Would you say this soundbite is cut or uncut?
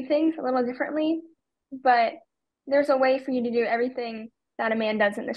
uncut